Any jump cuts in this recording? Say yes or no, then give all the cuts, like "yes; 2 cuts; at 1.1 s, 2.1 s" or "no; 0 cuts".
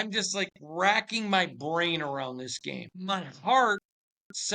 yes; 1 cut; at 2.9 s